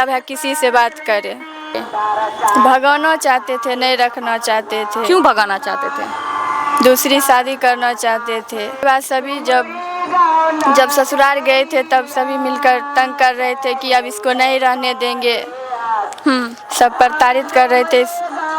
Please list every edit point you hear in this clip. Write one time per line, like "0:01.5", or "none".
0:01.7
0:08.8